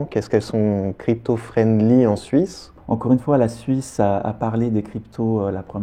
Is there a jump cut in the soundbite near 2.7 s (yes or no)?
yes